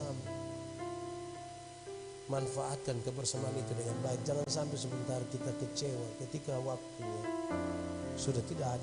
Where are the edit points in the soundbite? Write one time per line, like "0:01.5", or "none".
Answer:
none